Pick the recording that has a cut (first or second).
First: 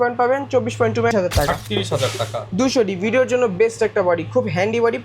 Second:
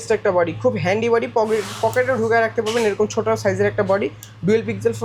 first